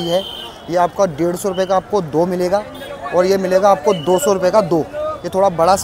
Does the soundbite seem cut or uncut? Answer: uncut